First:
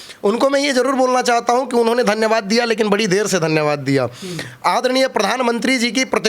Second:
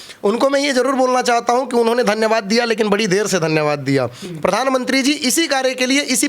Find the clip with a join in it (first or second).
second